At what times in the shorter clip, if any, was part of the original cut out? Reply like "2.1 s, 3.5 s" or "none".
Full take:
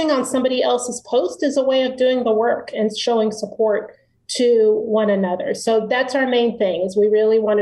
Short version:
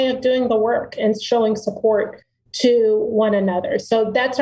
none